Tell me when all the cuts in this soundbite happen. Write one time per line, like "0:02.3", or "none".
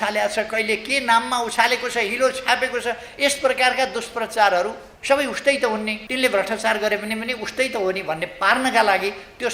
0:04.9
0:06.0